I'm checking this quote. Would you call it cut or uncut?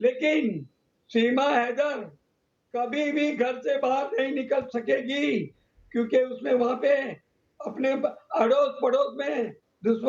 uncut